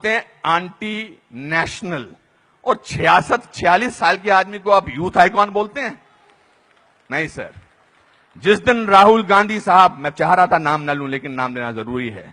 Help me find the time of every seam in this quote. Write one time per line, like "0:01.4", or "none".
none